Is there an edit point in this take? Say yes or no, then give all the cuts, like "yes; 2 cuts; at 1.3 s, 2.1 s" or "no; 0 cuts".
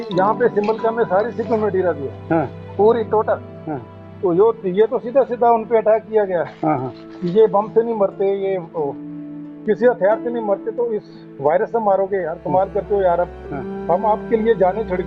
no; 0 cuts